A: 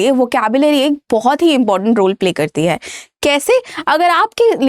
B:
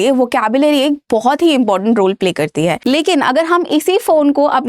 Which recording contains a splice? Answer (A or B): B